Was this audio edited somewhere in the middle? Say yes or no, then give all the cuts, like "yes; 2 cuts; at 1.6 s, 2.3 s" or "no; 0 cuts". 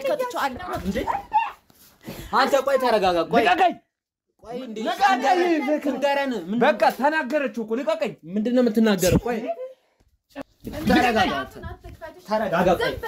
yes; 1 cut; at 10.3 s